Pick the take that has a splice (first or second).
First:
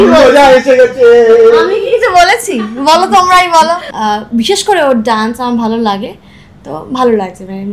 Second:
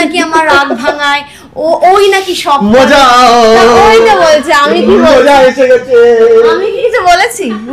first